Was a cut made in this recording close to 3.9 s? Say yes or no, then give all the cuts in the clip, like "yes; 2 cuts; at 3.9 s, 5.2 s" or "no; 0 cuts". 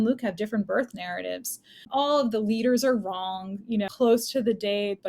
yes; 2 cuts; at 1.9 s, 3.9 s